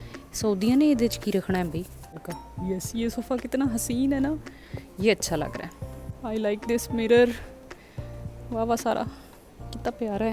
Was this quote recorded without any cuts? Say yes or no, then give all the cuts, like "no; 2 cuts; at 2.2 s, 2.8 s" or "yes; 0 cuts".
no; 2 cuts; at 2.2 s, 6.1 s